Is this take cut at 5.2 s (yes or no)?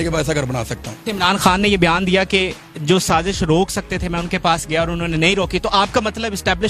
no